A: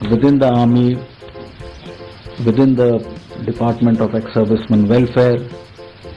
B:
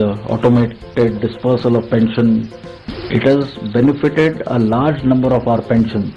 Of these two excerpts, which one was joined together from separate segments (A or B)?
B